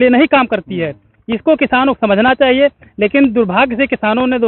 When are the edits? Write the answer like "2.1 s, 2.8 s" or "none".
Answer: none